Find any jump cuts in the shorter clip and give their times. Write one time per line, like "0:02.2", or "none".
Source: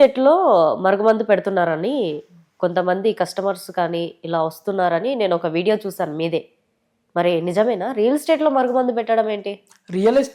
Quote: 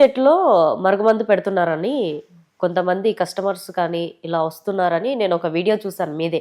none